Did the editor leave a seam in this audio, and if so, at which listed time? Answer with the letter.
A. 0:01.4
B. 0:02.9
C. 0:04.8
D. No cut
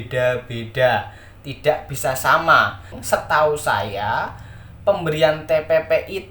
B